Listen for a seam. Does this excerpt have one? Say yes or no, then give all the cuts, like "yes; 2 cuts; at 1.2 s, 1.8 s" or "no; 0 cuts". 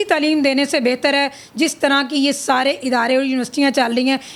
no; 0 cuts